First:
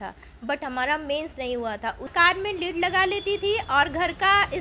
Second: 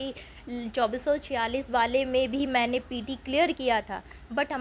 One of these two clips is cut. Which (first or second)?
first